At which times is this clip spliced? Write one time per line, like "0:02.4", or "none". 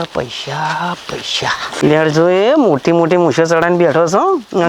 none